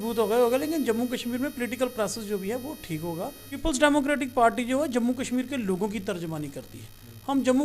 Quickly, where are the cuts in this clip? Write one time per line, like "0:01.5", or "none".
0:03.6